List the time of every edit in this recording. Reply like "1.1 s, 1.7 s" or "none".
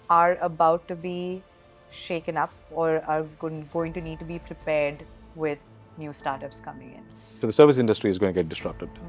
7.4 s